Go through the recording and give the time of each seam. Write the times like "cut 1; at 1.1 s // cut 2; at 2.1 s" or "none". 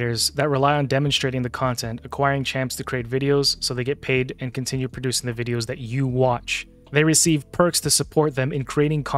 none